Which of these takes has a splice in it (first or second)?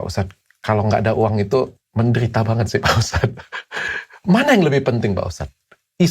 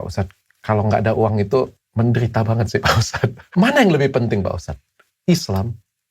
second